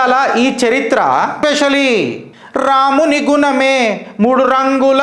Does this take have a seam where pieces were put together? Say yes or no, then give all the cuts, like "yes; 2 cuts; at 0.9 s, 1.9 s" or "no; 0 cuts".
yes; 1 cut; at 1.3 s